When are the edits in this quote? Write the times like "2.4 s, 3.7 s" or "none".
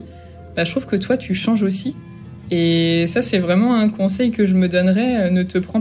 none